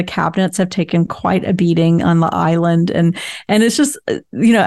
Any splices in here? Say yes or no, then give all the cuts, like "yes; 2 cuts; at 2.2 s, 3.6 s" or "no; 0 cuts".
no; 0 cuts